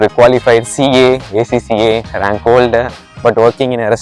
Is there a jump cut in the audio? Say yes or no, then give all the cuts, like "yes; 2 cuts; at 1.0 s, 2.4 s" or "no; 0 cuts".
no; 0 cuts